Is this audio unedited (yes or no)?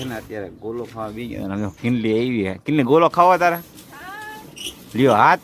yes